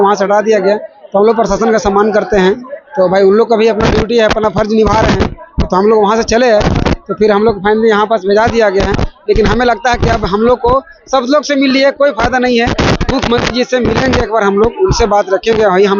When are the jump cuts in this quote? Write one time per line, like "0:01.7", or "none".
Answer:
none